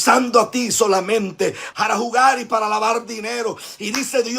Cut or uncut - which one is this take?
cut